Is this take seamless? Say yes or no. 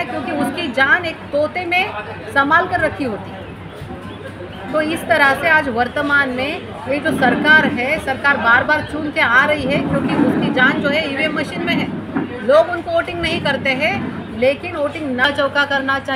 no